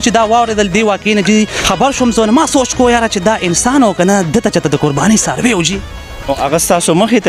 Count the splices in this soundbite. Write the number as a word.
two